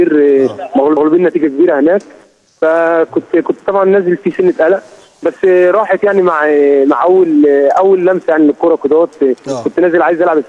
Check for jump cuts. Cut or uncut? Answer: cut